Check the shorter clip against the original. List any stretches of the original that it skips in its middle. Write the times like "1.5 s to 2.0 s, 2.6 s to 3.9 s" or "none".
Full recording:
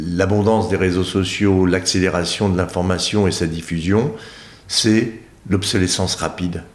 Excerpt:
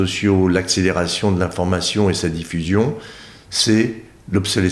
none